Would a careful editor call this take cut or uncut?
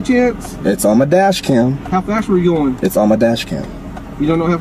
uncut